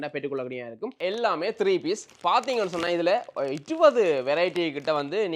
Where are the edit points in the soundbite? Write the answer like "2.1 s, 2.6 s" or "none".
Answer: 0.9 s